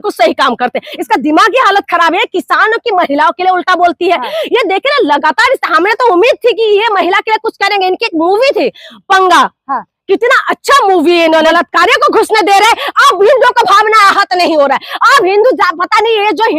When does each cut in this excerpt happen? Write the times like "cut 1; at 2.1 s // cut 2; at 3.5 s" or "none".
cut 1; at 11.5 s